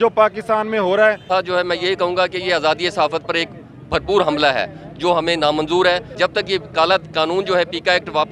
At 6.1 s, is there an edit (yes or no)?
yes